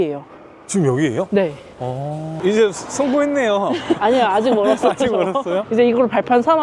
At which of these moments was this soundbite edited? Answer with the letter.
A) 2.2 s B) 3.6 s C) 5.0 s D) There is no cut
A